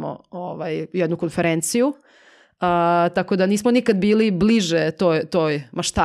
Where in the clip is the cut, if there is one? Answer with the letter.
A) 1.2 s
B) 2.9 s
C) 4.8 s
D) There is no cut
D